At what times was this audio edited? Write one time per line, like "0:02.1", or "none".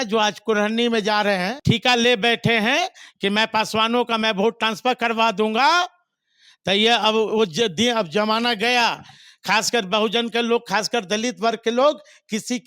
0:01.5